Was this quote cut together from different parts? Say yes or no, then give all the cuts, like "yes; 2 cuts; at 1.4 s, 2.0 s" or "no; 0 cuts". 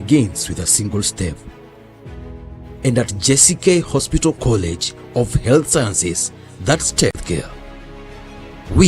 yes; 1 cut; at 7.2 s